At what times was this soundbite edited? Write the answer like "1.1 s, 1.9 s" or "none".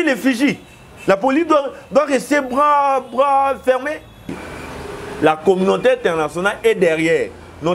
4.3 s